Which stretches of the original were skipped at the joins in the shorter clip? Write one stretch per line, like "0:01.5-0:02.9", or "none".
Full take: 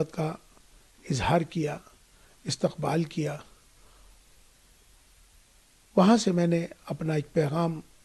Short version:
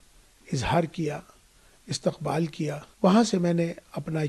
0:03.4-0:05.8